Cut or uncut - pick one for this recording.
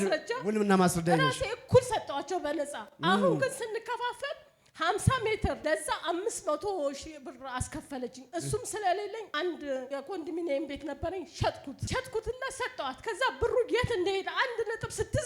cut